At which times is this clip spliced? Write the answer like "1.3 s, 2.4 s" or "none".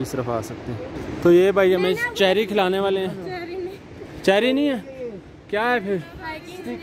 1.0 s